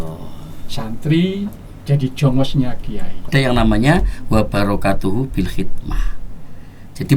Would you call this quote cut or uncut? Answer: cut